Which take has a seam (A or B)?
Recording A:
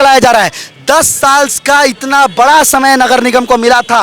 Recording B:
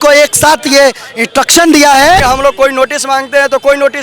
B